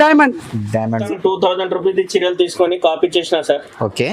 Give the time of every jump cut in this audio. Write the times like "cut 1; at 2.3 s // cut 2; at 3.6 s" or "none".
cut 1; at 0.9 s